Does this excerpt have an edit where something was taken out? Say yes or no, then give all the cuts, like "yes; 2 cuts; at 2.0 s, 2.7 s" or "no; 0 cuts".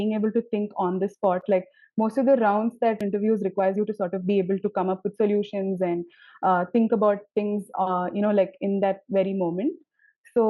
no; 0 cuts